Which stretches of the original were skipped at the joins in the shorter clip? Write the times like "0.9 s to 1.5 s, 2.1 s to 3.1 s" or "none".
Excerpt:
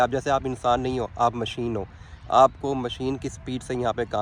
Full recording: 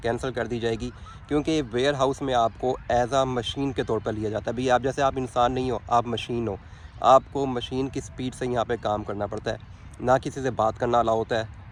none